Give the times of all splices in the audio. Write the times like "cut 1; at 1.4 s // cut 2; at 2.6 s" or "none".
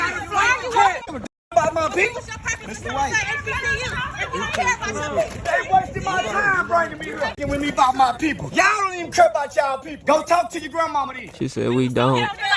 cut 1; at 1.1 s // cut 2; at 5.5 s // cut 3; at 7.3 s // cut 4; at 8.4 s // cut 5; at 9.9 s